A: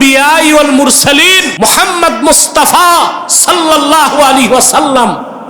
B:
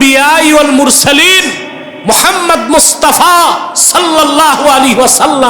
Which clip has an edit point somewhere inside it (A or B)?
A